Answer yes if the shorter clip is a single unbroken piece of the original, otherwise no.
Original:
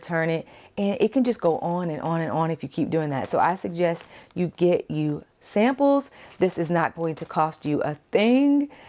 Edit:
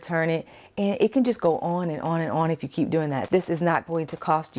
no